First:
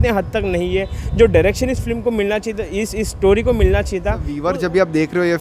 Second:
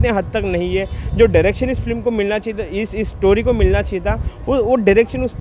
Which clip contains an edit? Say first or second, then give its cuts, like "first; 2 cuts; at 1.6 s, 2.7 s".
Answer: first; 1 cut; at 4.3 s